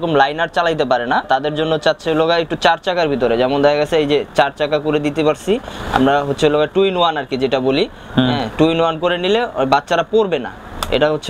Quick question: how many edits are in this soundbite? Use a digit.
0